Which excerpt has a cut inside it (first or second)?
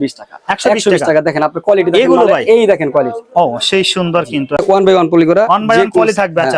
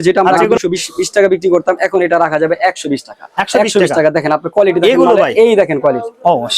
first